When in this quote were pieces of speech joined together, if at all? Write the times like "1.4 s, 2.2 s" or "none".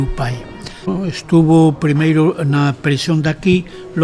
0.9 s